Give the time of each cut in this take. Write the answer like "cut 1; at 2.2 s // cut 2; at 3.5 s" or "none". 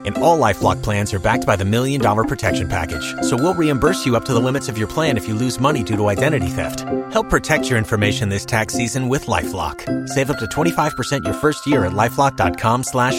none